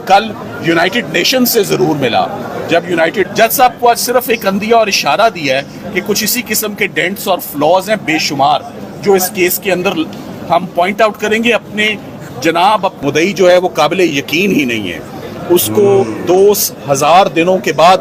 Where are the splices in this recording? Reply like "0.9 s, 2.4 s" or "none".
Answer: 3.3 s, 13.0 s